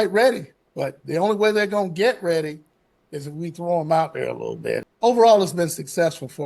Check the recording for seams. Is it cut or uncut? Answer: cut